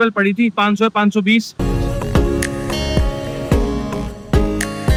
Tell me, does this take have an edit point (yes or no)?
no